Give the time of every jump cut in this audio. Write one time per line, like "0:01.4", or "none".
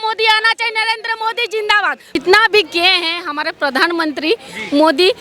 0:02.2